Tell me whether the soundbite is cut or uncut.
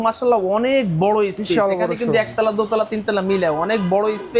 uncut